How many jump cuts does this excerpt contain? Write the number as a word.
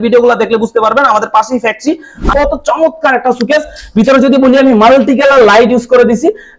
one